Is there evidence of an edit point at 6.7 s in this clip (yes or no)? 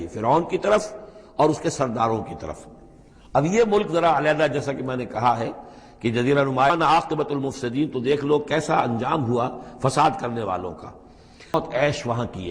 yes